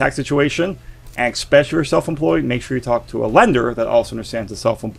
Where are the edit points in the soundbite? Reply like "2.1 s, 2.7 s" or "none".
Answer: none